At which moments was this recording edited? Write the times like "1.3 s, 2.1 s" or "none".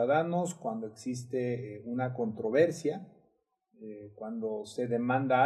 none